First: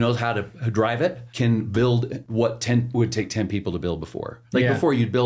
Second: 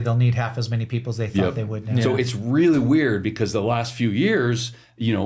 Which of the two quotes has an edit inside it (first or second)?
first